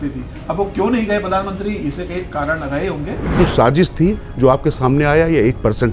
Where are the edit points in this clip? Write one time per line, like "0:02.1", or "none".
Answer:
0:03.4